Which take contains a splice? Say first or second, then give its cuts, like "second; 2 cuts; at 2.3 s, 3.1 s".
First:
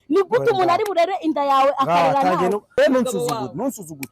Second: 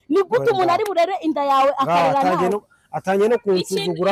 first; 1 cut; at 2.7 s